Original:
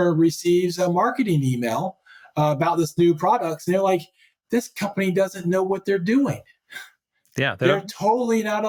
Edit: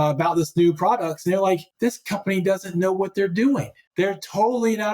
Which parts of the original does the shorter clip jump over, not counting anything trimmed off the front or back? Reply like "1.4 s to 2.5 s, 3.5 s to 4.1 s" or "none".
4.1 s to 4.4 s, 6.6 s to 7.6 s